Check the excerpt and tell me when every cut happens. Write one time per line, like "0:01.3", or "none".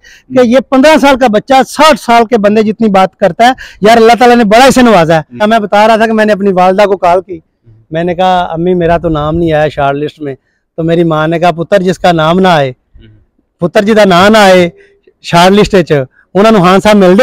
0:05.4